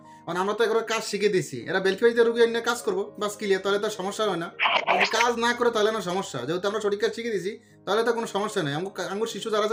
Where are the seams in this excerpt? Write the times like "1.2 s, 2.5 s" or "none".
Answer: none